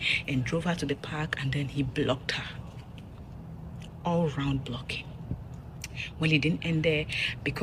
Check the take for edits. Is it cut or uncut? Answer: uncut